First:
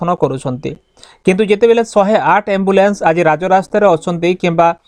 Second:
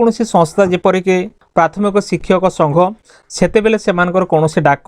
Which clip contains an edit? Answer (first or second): second